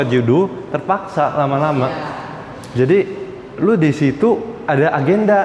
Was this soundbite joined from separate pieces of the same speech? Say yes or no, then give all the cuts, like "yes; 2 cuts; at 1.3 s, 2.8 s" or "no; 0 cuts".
no; 0 cuts